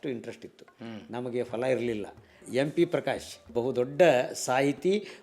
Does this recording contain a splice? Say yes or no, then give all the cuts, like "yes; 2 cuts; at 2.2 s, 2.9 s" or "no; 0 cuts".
yes; 2 cuts; at 2.3 s, 3.5 s